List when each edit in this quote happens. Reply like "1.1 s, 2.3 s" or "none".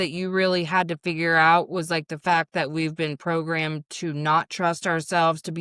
none